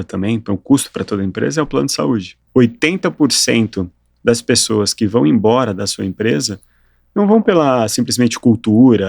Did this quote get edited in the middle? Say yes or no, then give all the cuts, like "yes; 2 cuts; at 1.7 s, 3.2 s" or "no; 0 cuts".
yes; 1 cut; at 2.4 s